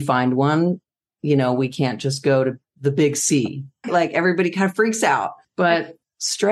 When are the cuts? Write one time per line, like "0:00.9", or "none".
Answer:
0:03.9
0:05.4